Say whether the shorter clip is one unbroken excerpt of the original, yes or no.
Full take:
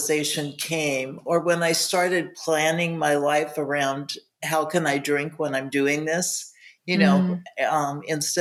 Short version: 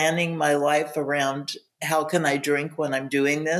yes